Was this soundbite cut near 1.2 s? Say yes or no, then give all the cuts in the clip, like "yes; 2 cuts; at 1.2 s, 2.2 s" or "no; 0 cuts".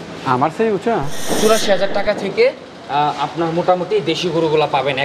yes; 1 cut; at 1.2 s